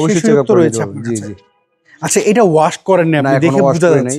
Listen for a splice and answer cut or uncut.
uncut